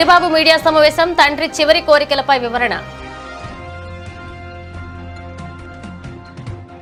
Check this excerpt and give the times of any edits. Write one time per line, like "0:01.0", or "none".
none